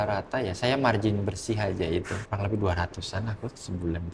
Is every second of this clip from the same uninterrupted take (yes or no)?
no